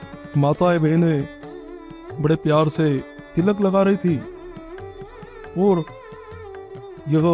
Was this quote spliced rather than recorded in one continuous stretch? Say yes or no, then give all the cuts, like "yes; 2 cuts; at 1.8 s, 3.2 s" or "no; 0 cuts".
yes; 1 cut; at 3.2 s